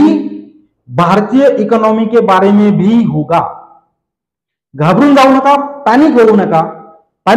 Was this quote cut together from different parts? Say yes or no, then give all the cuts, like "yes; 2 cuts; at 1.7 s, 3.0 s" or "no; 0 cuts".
no; 0 cuts